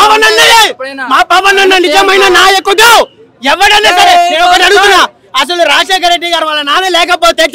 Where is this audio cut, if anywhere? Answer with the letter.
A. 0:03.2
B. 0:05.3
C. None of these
C